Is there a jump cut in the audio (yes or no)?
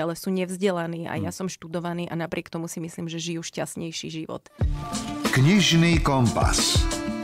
yes